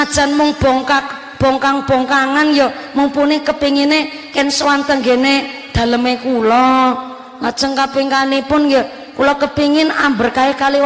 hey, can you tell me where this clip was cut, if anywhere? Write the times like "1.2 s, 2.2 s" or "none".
none